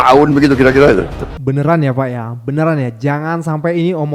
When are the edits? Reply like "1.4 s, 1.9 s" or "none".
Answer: 1.3 s